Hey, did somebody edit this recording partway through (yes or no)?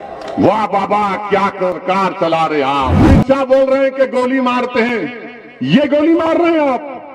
yes